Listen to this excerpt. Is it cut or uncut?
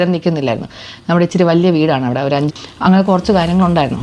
cut